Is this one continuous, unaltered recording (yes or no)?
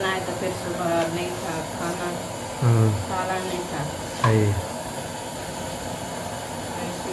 yes